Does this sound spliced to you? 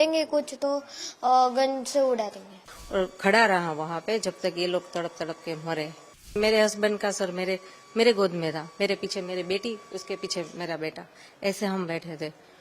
yes; 2 cuts; at 2.7 s, 6.4 s

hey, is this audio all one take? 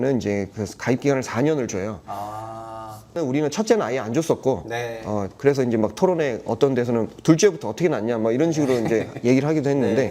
no; 1 cut; at 3.1 s

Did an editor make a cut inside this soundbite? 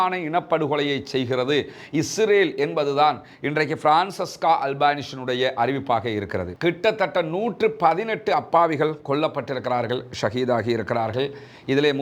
yes; 1 cut; at 6.6 s

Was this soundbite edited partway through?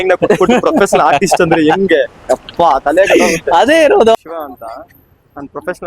yes; 1 cut; at 4.1 s

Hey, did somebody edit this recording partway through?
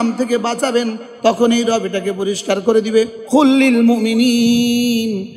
yes; 1 cut; at 3.2 s

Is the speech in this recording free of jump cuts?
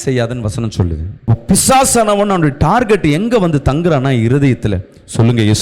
no; 1 cut; at 1.3 s

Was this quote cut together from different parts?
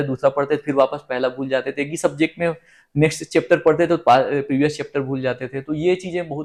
no; 0 cuts

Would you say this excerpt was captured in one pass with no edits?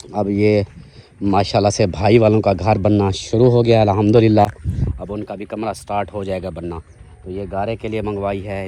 yes; 0 cuts

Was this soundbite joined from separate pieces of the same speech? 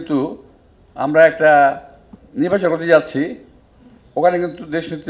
no; 0 cuts

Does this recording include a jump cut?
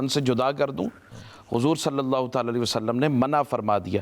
no; 0 cuts

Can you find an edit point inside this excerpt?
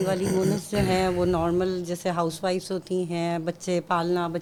no; 0 cuts

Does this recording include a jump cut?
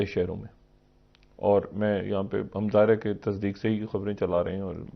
no; 0 cuts

